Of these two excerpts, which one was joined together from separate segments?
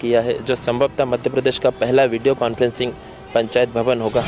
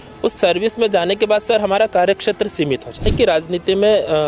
second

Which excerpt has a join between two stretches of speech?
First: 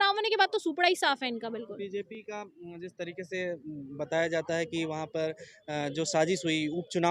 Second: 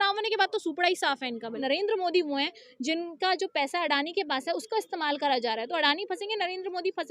second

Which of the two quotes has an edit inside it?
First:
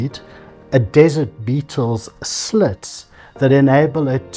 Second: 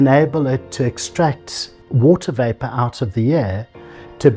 second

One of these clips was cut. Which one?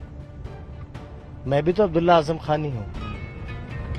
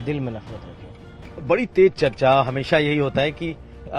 second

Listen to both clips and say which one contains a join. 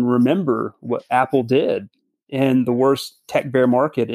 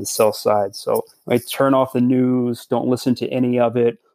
second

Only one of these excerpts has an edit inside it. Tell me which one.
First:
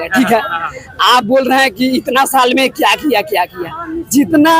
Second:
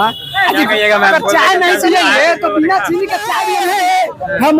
second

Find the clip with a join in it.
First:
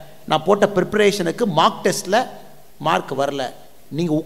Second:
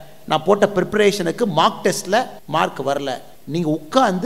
second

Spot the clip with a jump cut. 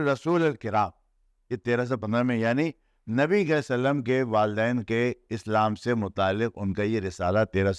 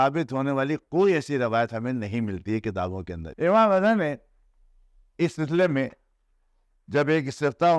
second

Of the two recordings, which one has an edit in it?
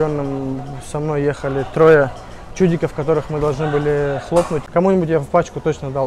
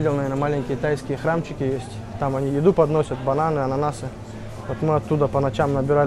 first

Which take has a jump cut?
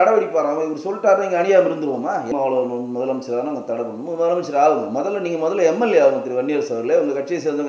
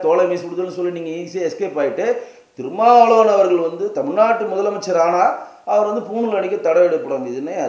first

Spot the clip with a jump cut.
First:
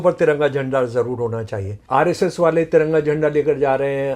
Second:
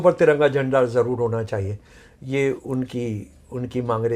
first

